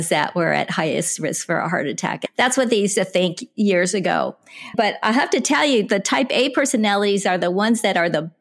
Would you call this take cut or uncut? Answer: cut